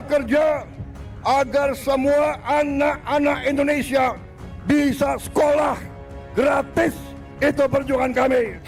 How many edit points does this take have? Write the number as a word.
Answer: zero